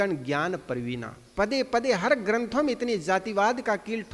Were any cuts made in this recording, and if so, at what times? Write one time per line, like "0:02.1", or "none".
none